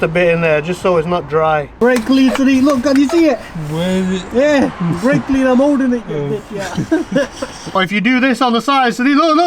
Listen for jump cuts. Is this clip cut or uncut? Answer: cut